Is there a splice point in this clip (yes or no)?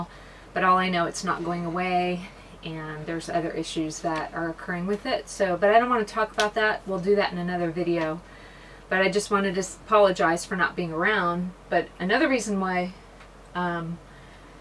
no